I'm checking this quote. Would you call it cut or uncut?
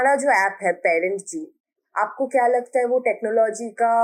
uncut